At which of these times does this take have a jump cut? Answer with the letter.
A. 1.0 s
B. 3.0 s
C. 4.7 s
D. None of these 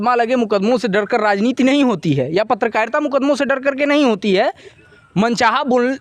C